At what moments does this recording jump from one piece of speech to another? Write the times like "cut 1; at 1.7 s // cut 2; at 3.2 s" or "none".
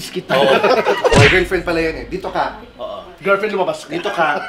cut 1; at 1.3 s